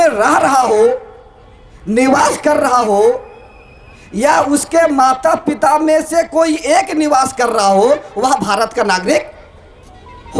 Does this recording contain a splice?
no; 0 cuts

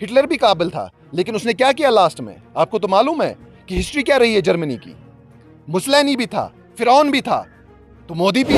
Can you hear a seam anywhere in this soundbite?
no; 0 cuts

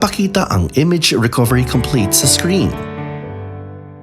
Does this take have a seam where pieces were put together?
yes; 1 cut; at 2.7 s

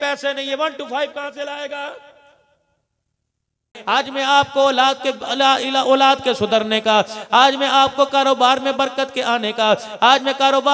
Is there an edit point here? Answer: yes; 1 cut; at 3.8 s

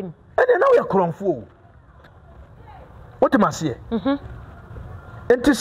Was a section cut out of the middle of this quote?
no; 0 cuts

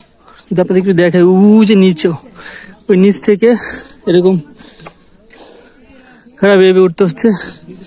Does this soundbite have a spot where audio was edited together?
no; 0 cuts

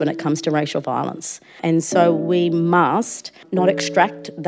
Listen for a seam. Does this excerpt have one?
yes; 2 cuts; at 1.6 s, 3.5 s

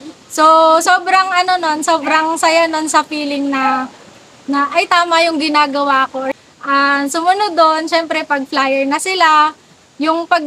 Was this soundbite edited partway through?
yes; 1 cut; at 6.3 s

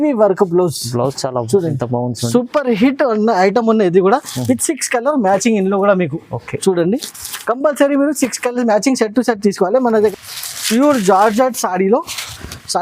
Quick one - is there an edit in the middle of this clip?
yes; 1 cut; at 10.1 s

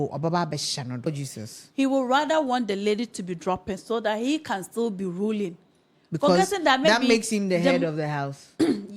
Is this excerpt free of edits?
no; 1 cut; at 1.1 s

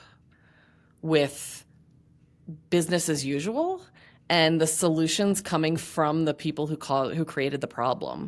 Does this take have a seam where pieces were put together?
no; 0 cuts

